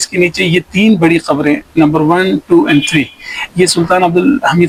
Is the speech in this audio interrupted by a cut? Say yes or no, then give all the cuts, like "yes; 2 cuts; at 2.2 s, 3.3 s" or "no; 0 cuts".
no; 0 cuts